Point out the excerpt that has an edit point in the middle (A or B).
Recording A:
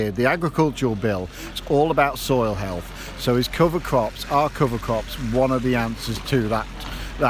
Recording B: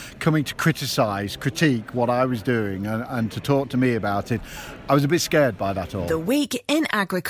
B